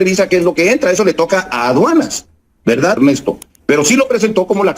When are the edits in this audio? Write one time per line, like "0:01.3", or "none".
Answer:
0:03.0